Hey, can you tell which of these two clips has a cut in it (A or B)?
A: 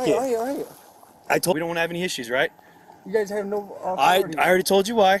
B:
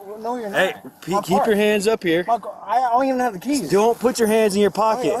A